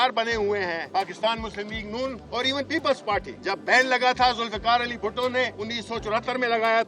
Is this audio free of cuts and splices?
no; 4 cuts; at 1.1 s, 2.2 s, 3.3 s, 5.6 s

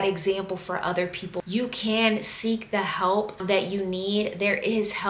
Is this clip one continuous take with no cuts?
yes; 0 cuts

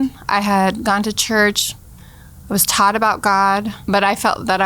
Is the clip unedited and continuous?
no; 1 cut; at 3.8 s

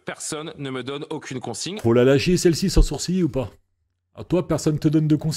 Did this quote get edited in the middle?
no; 0 cuts

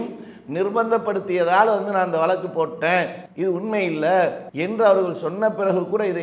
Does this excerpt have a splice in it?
yes; 2 cuts; at 3.2 s, 4.5 s

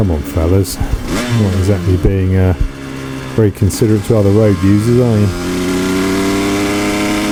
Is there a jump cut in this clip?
no; 0 cuts

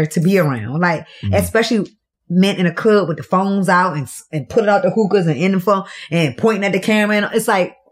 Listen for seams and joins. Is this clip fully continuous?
yes; 0 cuts

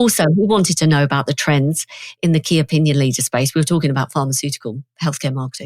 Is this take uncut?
yes; 0 cuts

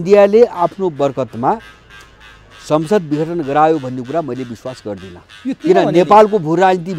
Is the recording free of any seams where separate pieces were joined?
yes; 0 cuts

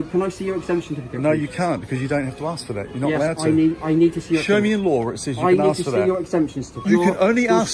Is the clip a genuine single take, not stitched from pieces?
no; 1 cut; at 6.8 s

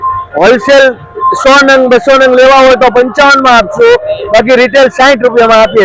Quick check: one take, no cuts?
yes; 0 cuts

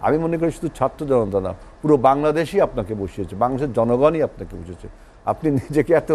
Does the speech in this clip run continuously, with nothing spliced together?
yes; 0 cuts

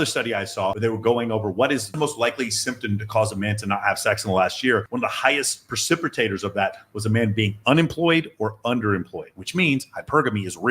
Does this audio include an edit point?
yes; 2 cuts; at 0.8 s, 1.9 s

